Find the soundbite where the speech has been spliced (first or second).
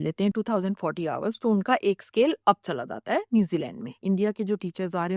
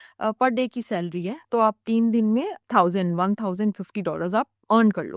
first